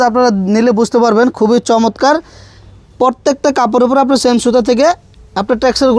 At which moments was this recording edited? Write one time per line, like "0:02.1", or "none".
none